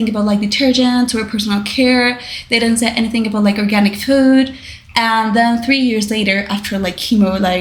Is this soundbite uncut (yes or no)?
yes